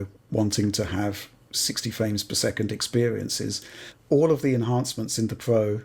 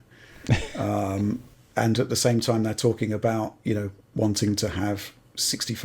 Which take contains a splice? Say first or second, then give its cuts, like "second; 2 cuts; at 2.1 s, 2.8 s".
second; 1 cut; at 2.0 s